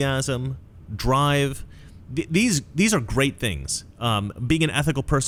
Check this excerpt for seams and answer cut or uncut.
uncut